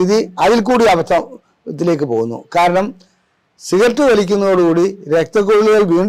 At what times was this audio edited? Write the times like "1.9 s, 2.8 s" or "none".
none